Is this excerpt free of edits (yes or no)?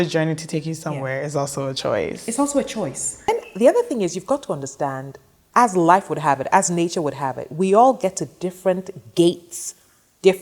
no